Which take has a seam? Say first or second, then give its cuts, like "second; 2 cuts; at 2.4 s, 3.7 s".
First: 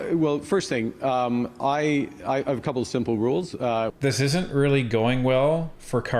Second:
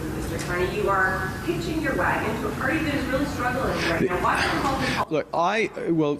first; 1 cut; at 3.9 s